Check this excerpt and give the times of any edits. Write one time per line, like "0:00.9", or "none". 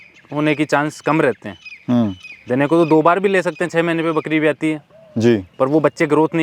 none